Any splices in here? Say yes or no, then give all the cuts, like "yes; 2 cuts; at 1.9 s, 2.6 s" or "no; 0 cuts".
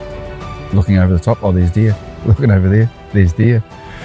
no; 0 cuts